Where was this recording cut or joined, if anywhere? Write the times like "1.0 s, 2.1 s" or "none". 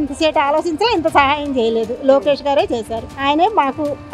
none